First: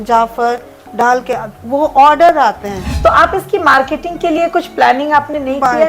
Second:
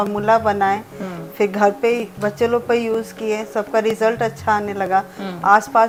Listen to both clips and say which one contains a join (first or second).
first